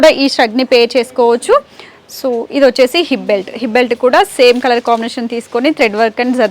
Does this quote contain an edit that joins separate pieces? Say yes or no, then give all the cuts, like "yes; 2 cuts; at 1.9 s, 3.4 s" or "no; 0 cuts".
no; 0 cuts